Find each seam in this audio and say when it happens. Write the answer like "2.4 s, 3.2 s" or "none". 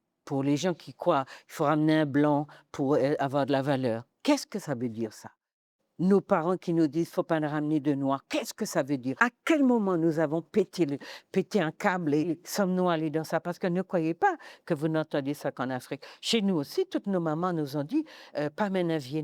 9.1 s, 12.4 s

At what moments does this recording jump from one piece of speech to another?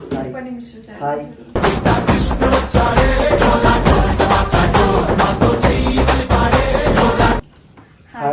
none

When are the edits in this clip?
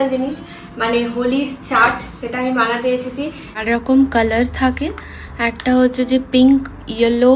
3.6 s

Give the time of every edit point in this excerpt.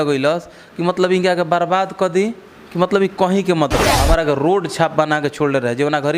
3.9 s

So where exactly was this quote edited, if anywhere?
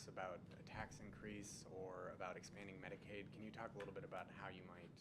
3.7 s

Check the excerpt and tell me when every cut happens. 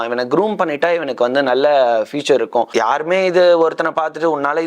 2.7 s

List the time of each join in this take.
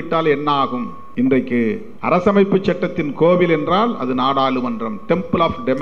1.0 s, 1.9 s

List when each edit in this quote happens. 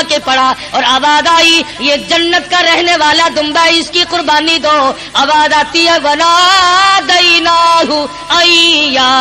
none

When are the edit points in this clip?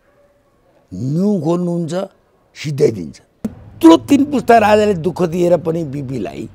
3.6 s

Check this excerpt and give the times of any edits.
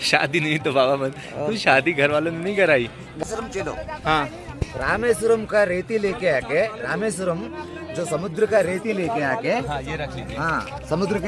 3.0 s

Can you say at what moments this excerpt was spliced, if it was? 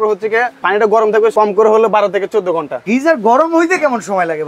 1.3 s, 2.8 s

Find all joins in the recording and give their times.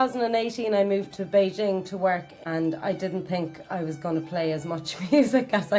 2.3 s

